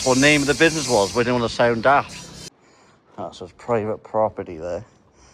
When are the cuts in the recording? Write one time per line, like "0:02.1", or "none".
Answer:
0:02.5